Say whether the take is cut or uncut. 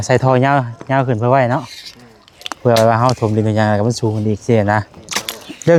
uncut